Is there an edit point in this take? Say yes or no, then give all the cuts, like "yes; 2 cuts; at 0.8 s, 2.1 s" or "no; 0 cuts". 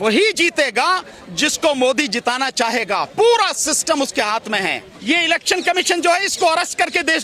yes; 1 cut; at 4.9 s